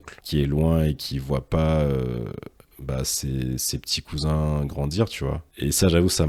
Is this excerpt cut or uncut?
uncut